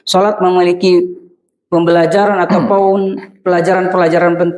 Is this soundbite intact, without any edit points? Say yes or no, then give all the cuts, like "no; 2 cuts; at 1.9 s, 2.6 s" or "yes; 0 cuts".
yes; 0 cuts